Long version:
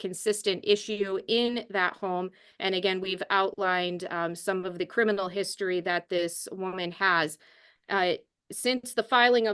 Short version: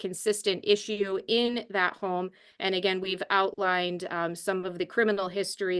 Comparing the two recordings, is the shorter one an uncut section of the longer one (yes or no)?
yes